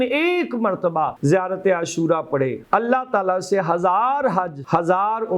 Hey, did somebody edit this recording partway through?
yes; 3 cuts; at 1.1 s, 2.6 s, 4.6 s

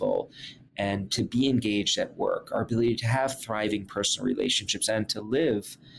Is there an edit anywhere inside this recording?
no; 0 cuts

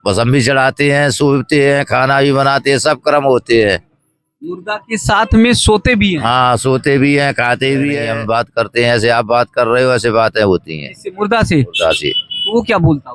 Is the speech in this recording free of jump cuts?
no; 1 cut; at 8.0 s

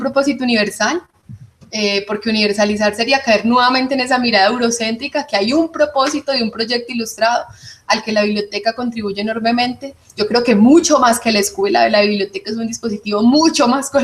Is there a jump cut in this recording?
yes; 1 cut; at 12.5 s

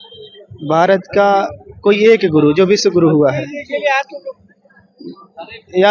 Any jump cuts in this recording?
no; 0 cuts

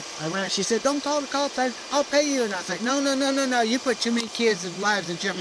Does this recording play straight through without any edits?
yes; 0 cuts

